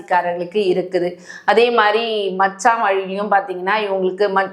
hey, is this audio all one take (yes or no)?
yes